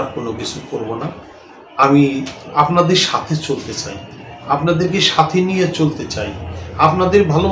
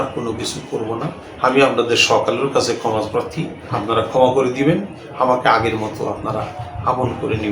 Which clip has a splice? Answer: second; 2 cuts; at 1.2 s, 3.7 s

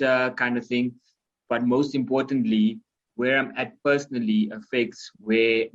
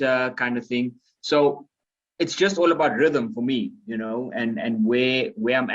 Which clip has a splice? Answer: first; 1 cut; at 1.1 s

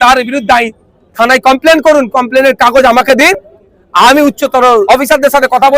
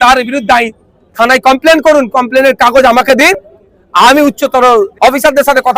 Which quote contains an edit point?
first; 1 cut; at 4.8 s

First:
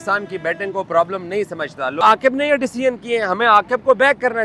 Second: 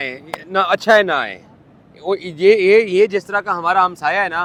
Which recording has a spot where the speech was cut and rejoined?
first; 1 cut; at 2.0 s

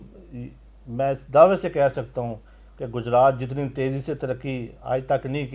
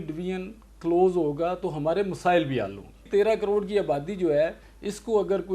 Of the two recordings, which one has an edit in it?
second; 1 cut; at 3.1 s

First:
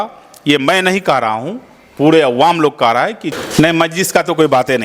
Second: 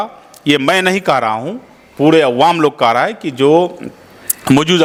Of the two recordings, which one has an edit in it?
first; 1 cut; at 3.2 s

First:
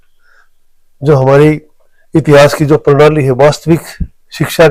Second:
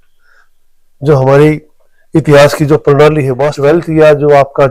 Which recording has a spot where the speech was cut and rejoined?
second; 1 cut; at 3.5 s

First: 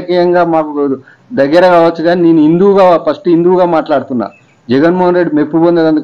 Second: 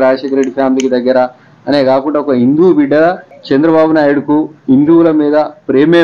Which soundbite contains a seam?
second; 1 cut; at 3.3 s

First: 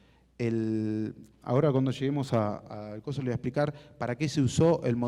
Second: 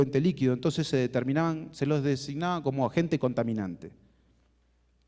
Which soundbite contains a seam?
first; 1 cut; at 1.2 s

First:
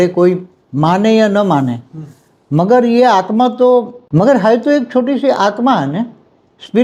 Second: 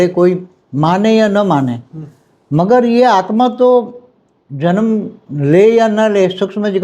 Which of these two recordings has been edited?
first; 1 cut; at 4.0 s

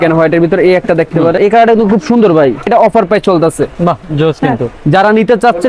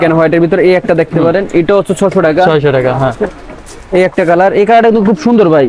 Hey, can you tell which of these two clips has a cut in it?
first; 2 cuts; at 1.4 s, 2.7 s

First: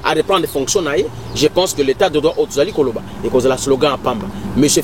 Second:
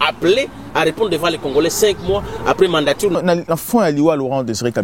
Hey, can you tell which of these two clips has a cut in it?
second; 1 cut; at 3.1 s

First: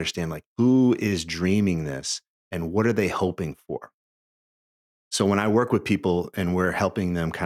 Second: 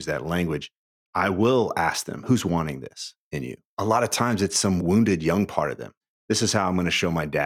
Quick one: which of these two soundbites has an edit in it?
second; 5 cuts; at 1.0 s, 2.2 s, 3.7 s, 4.8 s, 6.1 s

